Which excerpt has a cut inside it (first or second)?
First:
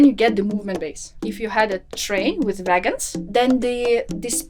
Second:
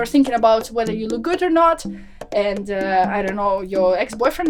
first